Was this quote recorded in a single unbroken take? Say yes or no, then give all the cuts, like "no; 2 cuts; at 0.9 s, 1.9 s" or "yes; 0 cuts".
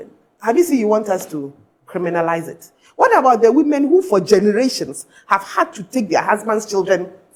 yes; 0 cuts